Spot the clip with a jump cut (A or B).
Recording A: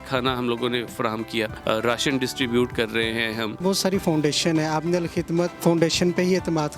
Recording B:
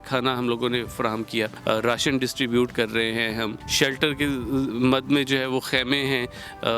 A